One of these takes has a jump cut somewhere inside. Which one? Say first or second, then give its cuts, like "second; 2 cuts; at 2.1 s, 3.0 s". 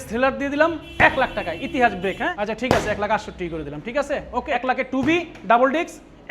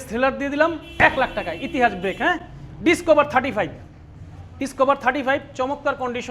first; 2 cuts; at 2.3 s, 4.8 s